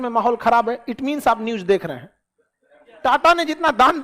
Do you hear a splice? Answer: yes; 1 cut; at 2.9 s

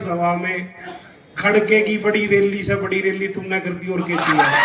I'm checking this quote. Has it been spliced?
no; 0 cuts

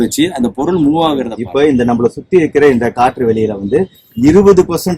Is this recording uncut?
no; 1 cut; at 1.4 s

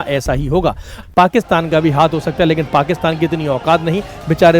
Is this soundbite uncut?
no; 1 cut; at 1.0 s

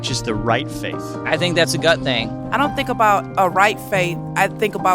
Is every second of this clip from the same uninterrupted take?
no; 2 cuts; at 1.3 s, 2.3 s

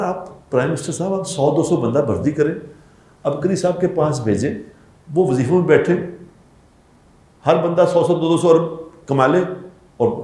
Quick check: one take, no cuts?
yes; 0 cuts

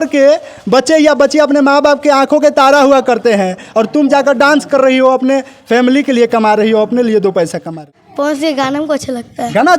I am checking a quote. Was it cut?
yes; 1 cut; at 7.7 s

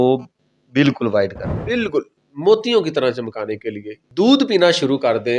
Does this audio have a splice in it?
yes; 1 cut; at 4.0 s

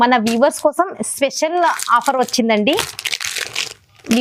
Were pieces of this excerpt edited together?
no; 0 cuts

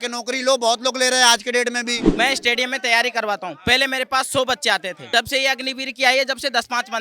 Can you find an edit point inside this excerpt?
yes; 2 cuts; at 2.0 s, 5.0 s

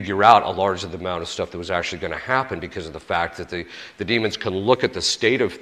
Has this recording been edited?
no; 0 cuts

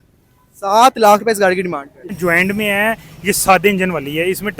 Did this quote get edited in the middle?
yes; 1 cut; at 2.1 s

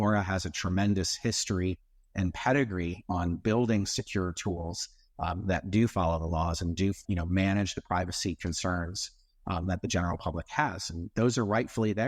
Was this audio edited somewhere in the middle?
no; 0 cuts

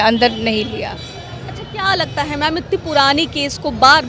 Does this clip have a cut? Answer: no; 0 cuts

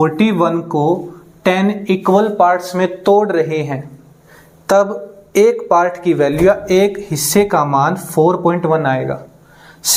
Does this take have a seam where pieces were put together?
no; 0 cuts

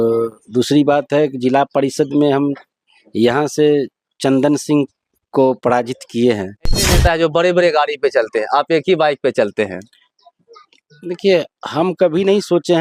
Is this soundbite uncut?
no; 1 cut; at 6.9 s

